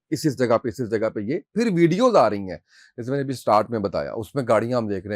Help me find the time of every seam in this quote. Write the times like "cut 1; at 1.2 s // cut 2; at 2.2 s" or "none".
none